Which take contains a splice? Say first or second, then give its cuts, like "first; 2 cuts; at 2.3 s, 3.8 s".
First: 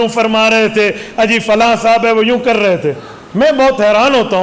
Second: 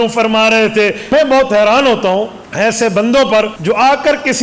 second; 3 cuts; at 1.0 s, 2.4 s, 3.6 s